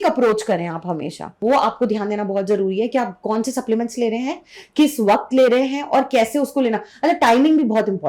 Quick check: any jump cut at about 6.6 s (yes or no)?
no